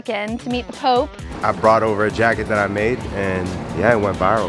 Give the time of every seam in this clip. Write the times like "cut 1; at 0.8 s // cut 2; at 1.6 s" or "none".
cut 1; at 1.4 s